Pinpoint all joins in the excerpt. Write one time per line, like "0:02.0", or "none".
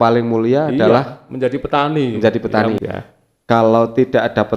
0:02.8